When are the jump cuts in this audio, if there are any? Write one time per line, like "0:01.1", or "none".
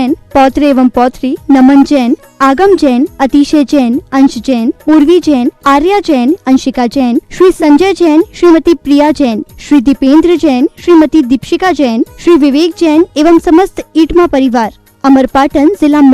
none